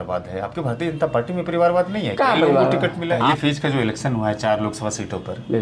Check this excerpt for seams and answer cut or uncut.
cut